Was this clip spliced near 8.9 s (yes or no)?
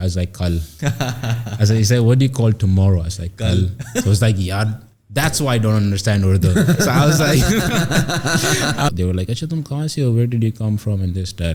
yes